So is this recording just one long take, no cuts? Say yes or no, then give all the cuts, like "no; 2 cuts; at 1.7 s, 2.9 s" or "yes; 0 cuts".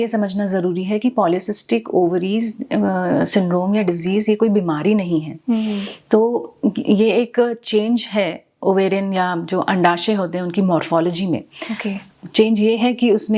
yes; 0 cuts